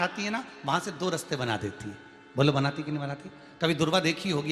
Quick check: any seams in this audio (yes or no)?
no